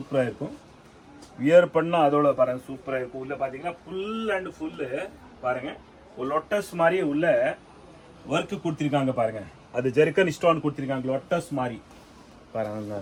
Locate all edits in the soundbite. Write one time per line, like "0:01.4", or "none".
none